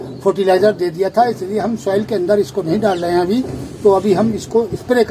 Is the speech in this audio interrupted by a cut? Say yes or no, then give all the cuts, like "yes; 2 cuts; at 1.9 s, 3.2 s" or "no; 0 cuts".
no; 0 cuts